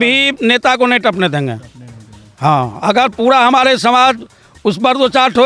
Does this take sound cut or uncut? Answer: uncut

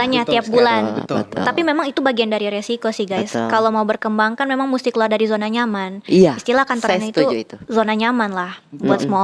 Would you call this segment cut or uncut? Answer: uncut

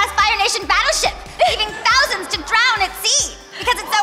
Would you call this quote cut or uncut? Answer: uncut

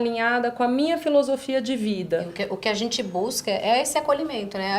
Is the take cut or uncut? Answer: cut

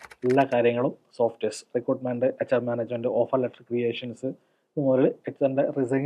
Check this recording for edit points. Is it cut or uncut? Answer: uncut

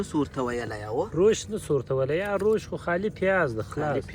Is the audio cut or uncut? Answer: uncut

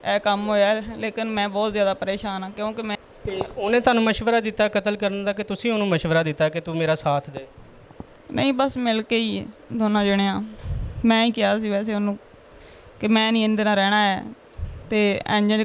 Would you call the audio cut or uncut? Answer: cut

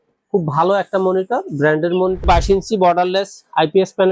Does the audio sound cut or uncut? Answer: cut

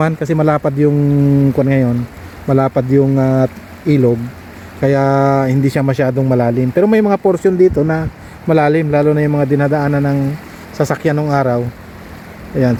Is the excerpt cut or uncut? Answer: uncut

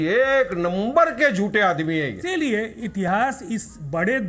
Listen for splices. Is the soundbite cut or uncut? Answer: cut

